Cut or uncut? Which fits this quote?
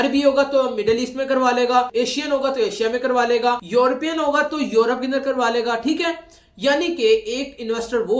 uncut